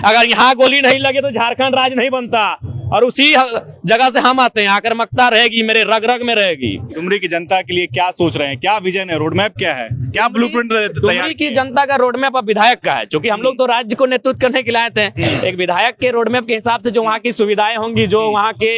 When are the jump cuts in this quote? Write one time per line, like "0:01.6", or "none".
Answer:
none